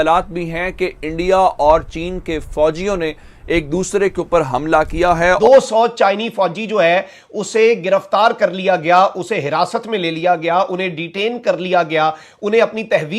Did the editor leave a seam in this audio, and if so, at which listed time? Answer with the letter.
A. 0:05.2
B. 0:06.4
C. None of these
A